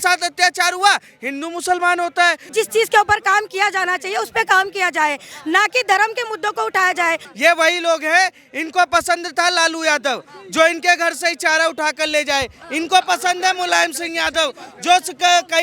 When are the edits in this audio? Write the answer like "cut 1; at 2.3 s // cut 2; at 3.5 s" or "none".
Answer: cut 1; at 2.5 s // cut 2; at 7.3 s